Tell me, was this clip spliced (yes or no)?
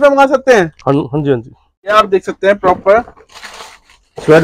yes